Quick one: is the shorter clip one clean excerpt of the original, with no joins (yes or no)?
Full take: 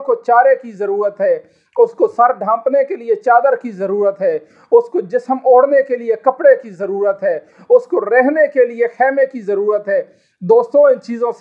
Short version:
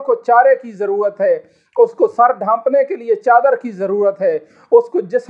yes